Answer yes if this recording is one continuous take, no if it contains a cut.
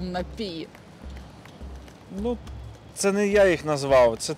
yes